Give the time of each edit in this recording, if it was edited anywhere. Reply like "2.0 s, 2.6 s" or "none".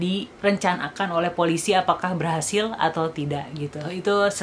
none